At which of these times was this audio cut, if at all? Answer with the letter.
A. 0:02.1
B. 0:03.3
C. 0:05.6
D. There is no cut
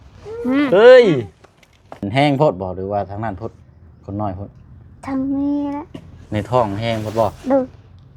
A